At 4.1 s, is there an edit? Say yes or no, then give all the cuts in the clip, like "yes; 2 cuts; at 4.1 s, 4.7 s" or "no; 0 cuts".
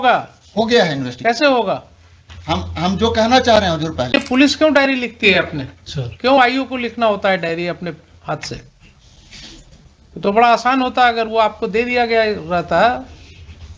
yes; 1 cut; at 4.1 s